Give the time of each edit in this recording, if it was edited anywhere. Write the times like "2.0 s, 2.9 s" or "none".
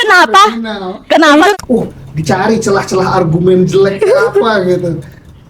1.5 s